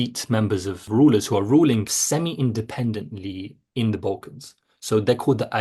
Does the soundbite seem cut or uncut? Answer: cut